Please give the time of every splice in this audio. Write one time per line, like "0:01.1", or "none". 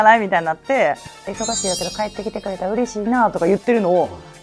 0:01.1

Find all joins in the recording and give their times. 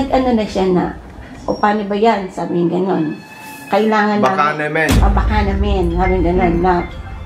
none

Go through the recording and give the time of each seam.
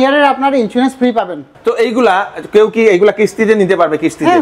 0:01.5

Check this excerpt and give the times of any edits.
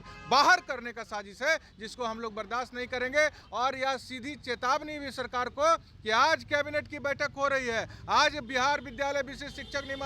0:03.4

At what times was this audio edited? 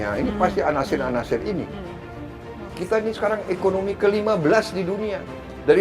0:02.2

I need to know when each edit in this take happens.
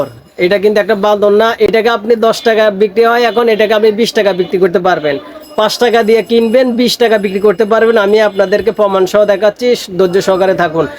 0:01.6

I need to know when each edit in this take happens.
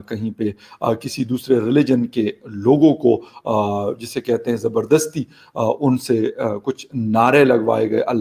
none

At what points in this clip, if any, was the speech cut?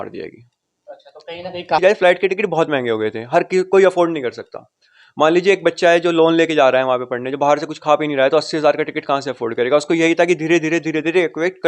0:01.8

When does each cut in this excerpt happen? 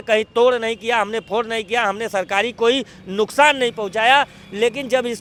none

